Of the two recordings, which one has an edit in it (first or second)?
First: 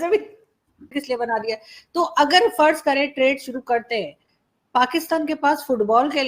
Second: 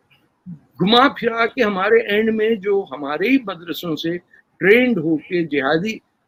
first